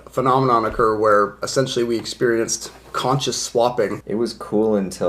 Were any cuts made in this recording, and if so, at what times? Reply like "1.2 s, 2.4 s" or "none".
4.0 s